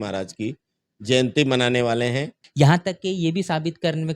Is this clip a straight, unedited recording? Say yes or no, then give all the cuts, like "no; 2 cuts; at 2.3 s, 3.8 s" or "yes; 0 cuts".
no; 1 cut; at 2.4 s